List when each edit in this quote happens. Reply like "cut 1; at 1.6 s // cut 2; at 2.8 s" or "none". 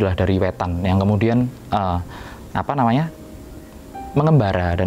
none